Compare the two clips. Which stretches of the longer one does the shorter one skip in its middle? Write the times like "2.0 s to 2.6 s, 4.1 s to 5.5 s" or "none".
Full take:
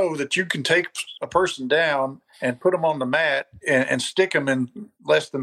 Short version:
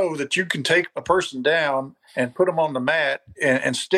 0.9 s to 1.2 s